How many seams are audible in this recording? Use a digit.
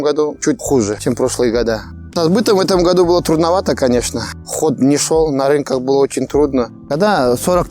2